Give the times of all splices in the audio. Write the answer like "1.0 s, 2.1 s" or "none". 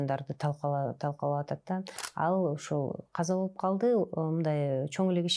2.0 s

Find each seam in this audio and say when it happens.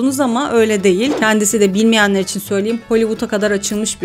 1.2 s

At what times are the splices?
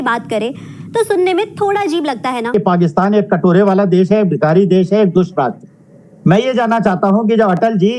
2.5 s

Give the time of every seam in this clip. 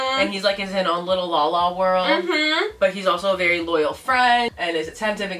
4.5 s

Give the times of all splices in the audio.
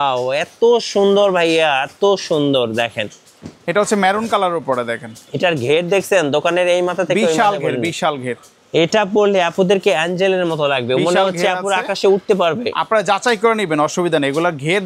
none

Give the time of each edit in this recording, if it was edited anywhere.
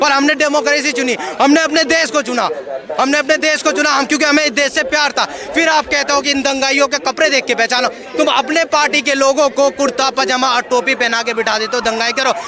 none

